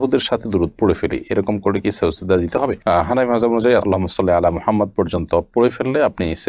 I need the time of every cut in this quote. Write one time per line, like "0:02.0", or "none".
none